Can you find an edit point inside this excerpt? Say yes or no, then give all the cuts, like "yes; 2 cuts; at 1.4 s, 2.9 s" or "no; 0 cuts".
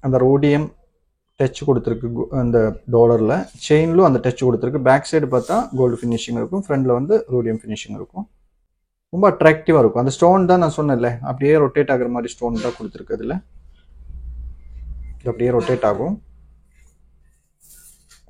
no; 0 cuts